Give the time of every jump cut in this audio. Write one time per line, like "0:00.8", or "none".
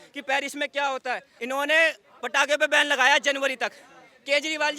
0:01.3